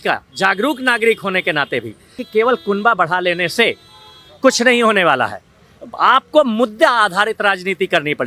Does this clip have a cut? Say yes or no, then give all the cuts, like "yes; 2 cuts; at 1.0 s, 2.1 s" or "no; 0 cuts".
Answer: yes; 1 cut; at 2.2 s